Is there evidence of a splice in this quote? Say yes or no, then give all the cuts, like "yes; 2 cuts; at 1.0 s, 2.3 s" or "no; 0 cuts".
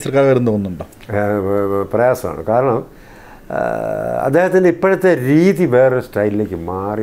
no; 0 cuts